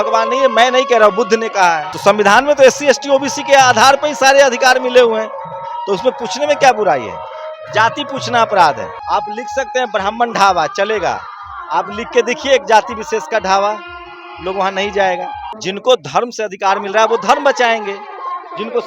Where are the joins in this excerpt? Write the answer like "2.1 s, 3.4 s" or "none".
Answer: 1.9 s, 9.0 s, 15.5 s